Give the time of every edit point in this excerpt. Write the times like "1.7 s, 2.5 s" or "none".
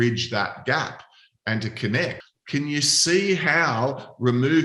2.2 s